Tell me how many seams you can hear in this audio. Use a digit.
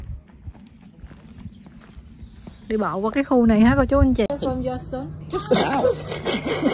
1